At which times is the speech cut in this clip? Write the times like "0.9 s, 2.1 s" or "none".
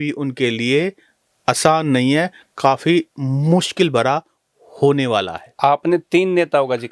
none

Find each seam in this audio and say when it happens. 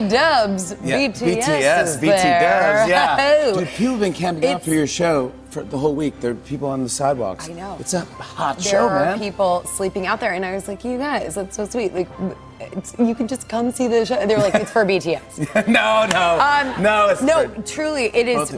none

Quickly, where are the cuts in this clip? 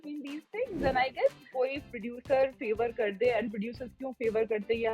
1.4 s

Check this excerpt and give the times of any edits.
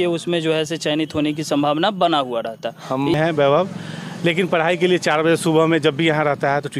3.2 s

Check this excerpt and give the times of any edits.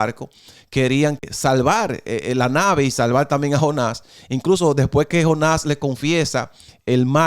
1.2 s

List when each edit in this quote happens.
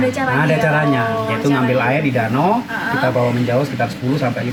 none

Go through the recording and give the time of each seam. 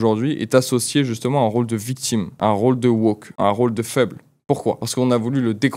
2.3 s, 3.3 s, 4.8 s

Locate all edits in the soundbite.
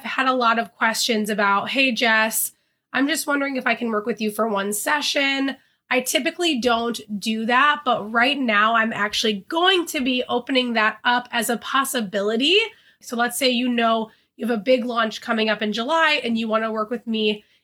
13.0 s

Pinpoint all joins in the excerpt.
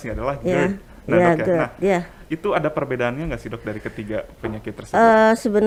none

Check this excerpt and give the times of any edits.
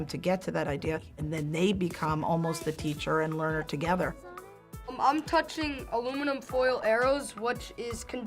1.2 s, 4.6 s

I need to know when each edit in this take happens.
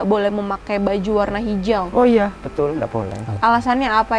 3.2 s

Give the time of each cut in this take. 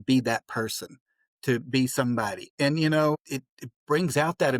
3.2 s

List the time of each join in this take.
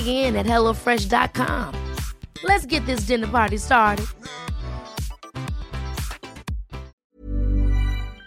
7.0 s

